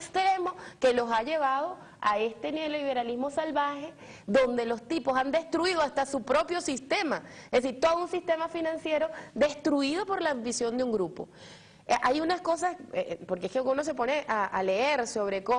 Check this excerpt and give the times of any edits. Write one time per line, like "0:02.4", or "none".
0:01.8